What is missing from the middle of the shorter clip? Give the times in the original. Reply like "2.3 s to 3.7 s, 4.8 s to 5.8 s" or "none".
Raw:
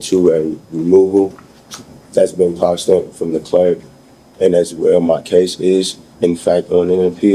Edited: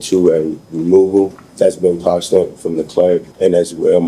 1.4 s to 2.0 s, 3.8 s to 4.3 s